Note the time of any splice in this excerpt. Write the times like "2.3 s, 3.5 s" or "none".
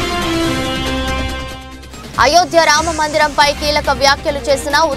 1.7 s